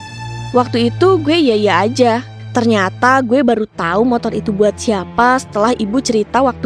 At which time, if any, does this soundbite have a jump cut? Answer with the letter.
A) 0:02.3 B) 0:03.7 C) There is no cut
A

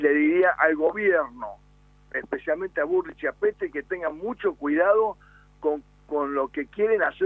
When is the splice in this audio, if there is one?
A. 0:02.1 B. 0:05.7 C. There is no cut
A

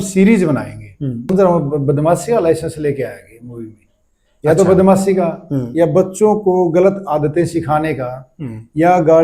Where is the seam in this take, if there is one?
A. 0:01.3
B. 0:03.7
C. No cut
A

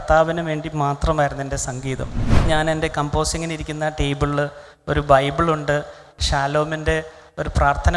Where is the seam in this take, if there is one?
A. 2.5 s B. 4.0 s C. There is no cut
A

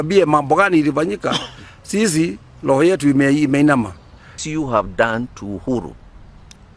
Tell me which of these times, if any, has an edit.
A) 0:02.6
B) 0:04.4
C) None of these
B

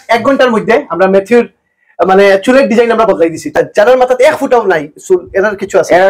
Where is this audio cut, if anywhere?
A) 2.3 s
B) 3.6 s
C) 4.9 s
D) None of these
B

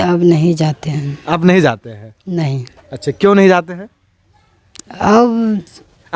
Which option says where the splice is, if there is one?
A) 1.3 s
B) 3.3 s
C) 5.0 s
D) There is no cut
D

